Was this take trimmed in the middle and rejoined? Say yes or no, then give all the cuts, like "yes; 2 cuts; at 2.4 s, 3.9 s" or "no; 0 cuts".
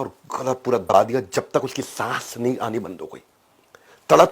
yes; 1 cut; at 0.9 s